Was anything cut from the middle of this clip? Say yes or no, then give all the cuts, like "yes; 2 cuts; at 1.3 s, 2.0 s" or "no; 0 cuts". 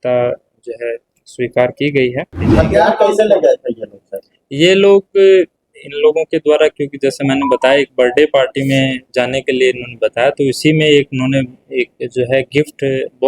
yes; 1 cut; at 2.4 s